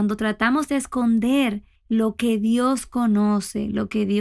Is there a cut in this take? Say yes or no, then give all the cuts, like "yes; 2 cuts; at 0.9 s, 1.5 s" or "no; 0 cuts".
yes; 1 cut; at 1.7 s